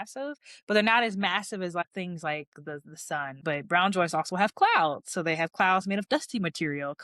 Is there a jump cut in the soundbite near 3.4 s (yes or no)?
yes